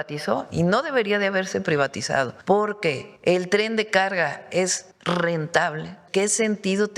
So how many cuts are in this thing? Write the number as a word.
four